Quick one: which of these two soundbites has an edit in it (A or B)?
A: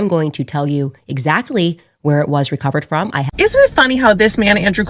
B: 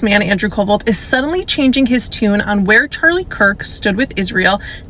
A